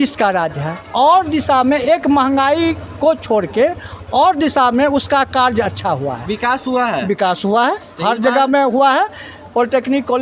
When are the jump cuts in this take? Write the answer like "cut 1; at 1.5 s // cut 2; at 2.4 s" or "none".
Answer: none